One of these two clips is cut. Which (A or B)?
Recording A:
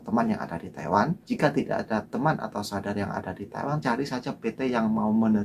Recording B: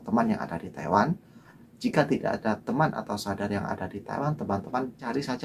A